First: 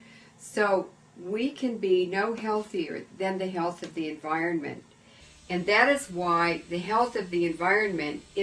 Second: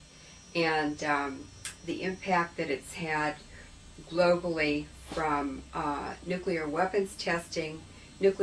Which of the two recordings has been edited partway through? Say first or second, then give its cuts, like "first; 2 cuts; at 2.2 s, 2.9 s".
first; 1 cut; at 2.5 s